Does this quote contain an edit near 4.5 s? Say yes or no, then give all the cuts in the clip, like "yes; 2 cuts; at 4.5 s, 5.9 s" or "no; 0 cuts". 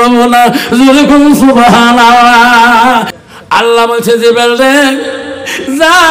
no; 1 cut; at 3.1 s